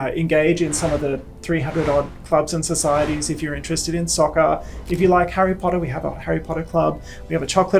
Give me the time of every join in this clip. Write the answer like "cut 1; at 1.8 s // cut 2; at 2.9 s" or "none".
none